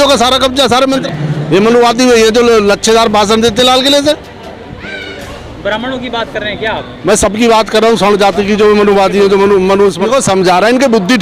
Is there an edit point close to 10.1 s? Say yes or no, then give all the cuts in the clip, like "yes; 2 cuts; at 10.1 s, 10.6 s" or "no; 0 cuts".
yes; 2 cuts; at 1.0 s, 10.1 s